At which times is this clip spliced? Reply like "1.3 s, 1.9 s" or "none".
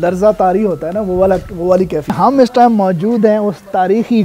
2.1 s